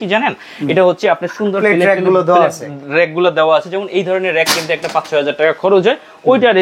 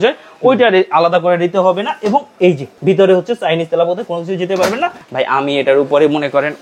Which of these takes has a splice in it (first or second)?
second